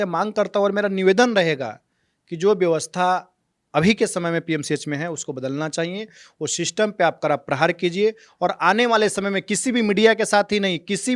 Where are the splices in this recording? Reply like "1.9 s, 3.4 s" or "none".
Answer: none